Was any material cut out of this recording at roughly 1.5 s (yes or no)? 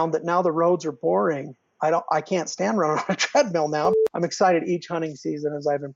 no